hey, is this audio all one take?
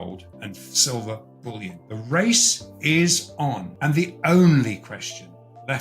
no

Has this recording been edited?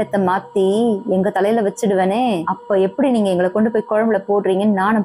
no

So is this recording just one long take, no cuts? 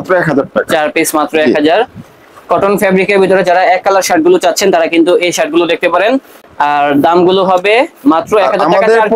yes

